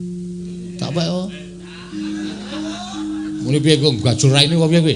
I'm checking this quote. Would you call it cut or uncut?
uncut